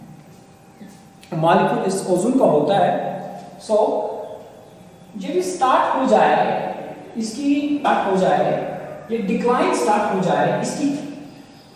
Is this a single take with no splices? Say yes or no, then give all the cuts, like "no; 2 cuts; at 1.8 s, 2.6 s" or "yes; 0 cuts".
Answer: no; 1 cut; at 7.8 s